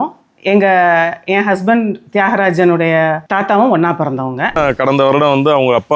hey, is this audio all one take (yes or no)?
no